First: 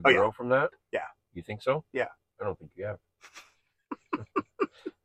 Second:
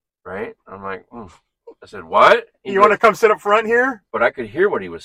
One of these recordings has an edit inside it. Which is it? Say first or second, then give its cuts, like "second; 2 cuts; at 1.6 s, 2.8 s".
second; 2 cuts; at 2.6 s, 4.0 s